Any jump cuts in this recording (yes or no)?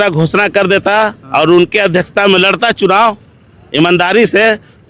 no